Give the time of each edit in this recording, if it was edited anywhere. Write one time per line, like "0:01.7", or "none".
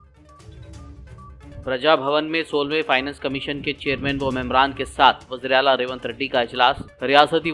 0:00.9